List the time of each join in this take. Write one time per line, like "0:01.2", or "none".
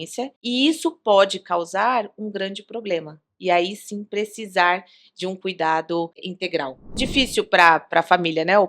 0:06.9